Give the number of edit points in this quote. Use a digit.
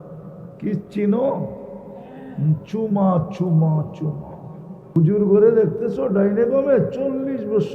1